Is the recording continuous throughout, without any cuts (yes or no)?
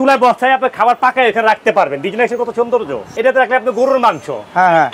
no